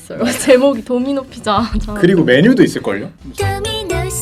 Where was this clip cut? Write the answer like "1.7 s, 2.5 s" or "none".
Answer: 3.1 s